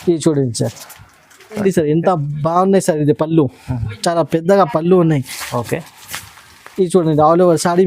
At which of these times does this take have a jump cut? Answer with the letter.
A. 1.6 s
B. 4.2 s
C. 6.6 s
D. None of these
A